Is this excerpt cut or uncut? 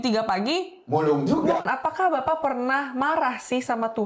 cut